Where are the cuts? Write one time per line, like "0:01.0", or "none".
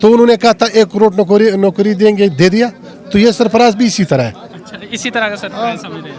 none